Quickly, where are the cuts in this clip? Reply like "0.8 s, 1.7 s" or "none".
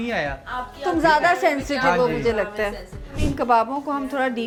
none